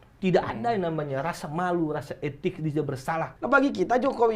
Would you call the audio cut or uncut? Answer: cut